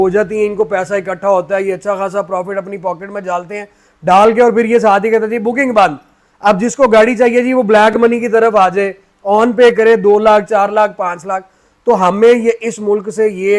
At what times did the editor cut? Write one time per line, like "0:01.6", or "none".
none